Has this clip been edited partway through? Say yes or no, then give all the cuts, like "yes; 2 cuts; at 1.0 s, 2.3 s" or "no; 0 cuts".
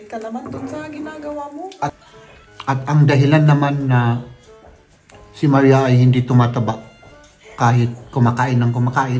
yes; 1 cut; at 1.9 s